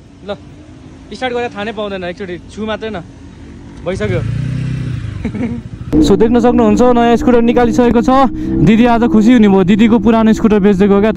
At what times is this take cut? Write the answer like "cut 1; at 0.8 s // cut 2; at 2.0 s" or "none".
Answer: cut 1; at 5.9 s